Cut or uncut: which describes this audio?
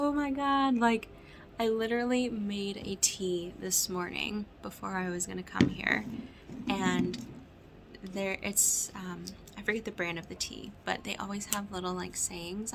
uncut